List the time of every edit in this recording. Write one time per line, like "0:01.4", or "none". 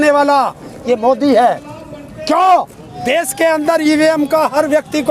0:02.9